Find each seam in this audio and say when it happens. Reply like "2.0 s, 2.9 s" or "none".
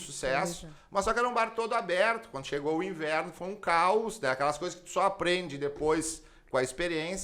none